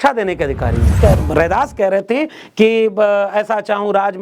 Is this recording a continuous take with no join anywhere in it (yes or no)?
no